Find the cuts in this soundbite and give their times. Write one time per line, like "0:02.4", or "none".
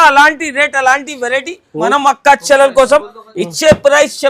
0:01.9